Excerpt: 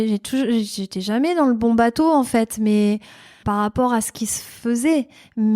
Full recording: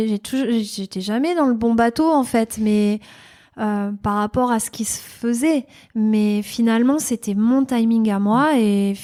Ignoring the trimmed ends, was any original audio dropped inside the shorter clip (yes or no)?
yes